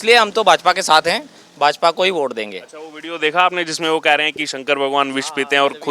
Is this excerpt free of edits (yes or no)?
yes